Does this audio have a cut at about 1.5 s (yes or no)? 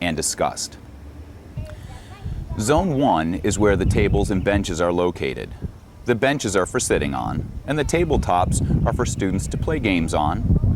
yes